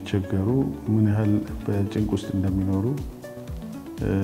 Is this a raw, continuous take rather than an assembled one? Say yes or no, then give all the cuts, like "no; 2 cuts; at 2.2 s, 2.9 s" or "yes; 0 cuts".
yes; 0 cuts